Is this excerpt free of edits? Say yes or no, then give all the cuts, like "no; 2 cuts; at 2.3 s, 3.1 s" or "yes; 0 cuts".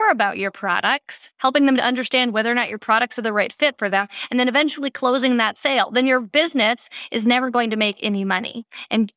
yes; 0 cuts